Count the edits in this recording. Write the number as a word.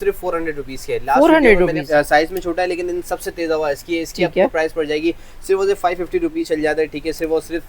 two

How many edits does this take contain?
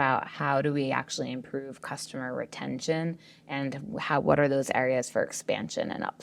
zero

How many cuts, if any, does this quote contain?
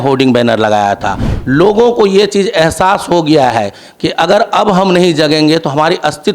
one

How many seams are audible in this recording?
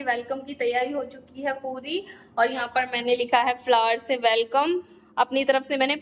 zero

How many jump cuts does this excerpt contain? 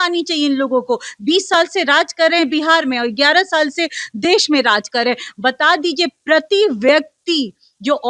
zero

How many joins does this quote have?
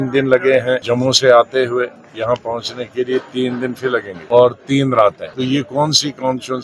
three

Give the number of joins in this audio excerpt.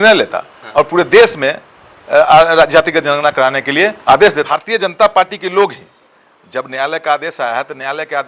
one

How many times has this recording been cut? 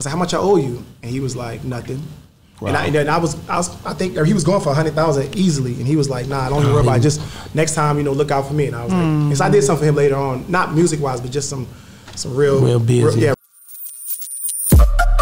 one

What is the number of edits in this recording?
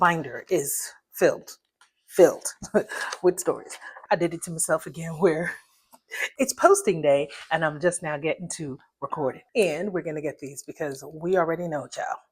three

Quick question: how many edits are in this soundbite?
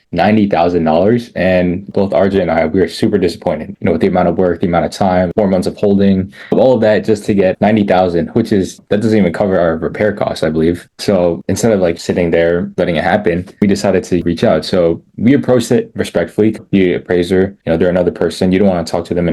five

